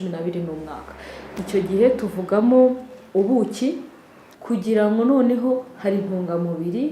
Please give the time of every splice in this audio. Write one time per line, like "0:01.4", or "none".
0:04.2